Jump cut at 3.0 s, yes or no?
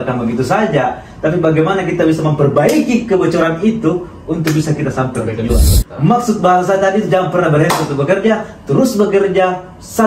no